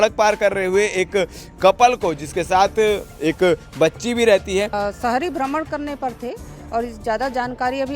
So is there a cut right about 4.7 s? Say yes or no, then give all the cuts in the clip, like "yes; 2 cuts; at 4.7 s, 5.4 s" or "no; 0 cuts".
yes; 1 cut; at 4.7 s